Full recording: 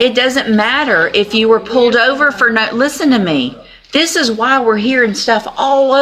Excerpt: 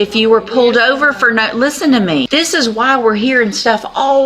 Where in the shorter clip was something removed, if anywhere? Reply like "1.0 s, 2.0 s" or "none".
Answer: 2.3 s